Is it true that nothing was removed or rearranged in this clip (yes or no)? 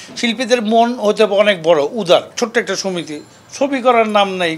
no